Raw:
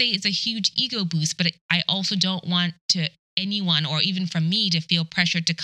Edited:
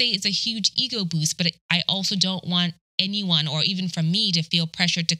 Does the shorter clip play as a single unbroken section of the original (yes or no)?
no